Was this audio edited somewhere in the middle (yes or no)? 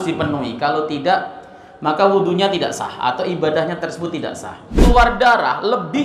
yes